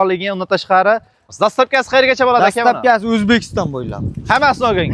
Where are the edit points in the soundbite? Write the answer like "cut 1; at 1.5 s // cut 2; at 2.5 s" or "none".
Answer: cut 1; at 1.3 s